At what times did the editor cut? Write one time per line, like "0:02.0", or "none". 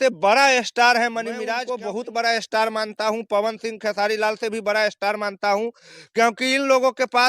0:01.6

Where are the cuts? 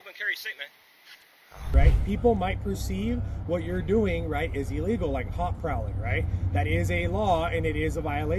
0:01.7

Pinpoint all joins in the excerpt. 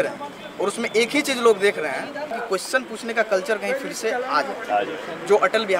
0:02.4

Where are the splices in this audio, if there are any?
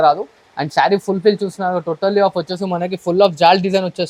none

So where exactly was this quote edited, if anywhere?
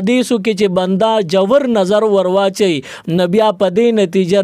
none

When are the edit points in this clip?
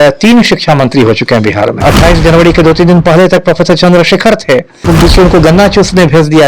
0:01.8
0:04.7

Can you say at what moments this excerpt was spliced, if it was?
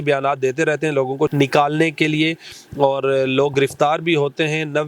0:01.3

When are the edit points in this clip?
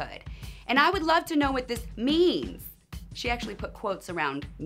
0:02.5

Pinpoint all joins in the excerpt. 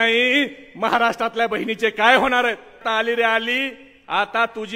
0:02.8

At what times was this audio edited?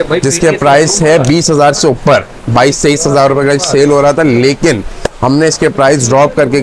none

